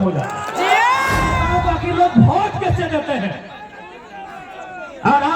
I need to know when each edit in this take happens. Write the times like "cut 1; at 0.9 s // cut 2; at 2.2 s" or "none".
cut 1; at 1.3 s